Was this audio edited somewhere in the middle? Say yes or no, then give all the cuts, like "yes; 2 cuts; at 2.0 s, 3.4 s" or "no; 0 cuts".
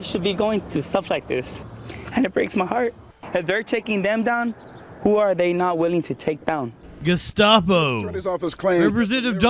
yes; 2 cuts; at 3.2 s, 6.8 s